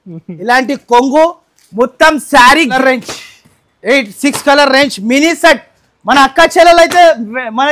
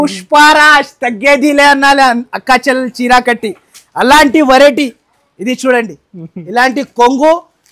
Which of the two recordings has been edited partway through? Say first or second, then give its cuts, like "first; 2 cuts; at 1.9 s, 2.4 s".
first; 1 cut; at 2.7 s